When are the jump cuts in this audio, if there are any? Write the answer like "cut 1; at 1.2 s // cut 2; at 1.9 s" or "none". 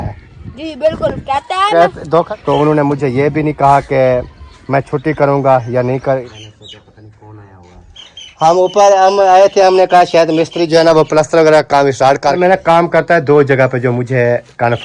cut 1; at 2.3 s // cut 2; at 6.3 s // cut 3; at 12.4 s